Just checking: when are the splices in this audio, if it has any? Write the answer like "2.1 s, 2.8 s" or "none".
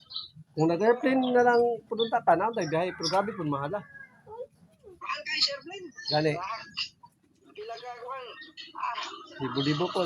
none